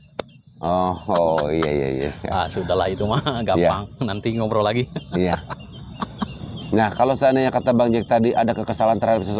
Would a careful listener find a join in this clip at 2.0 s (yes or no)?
no